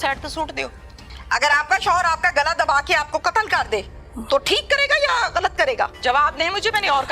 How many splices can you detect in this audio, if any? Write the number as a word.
two